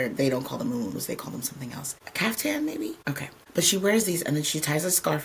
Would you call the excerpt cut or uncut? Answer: cut